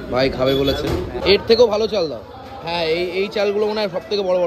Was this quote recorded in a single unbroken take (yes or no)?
no